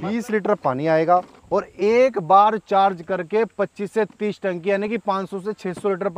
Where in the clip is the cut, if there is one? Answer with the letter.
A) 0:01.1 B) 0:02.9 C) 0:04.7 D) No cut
D